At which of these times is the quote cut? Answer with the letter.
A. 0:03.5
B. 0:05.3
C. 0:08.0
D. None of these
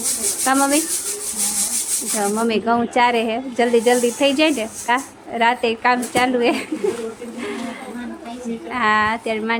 D